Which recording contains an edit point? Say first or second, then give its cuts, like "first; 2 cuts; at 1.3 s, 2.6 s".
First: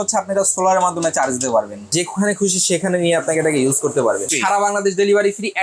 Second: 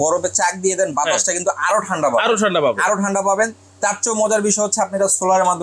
first; 2 cuts; at 1.9 s, 4.3 s